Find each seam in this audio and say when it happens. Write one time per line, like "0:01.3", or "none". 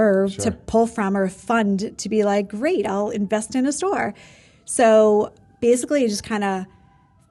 none